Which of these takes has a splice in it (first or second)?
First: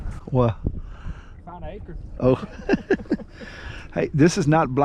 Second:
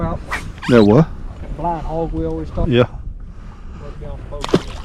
second